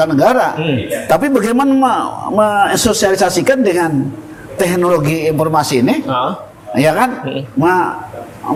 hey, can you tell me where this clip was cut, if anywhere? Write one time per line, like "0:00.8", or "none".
none